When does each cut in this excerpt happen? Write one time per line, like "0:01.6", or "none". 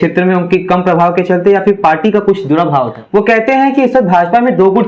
0:03.0